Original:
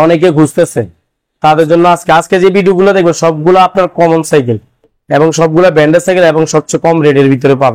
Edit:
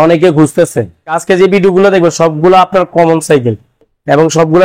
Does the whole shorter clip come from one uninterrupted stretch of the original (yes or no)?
no